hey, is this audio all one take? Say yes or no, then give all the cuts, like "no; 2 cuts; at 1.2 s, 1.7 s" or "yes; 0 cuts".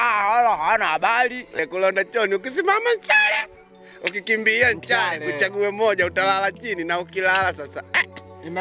no; 1 cut; at 1.6 s